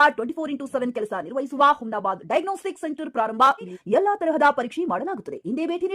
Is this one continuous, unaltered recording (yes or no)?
no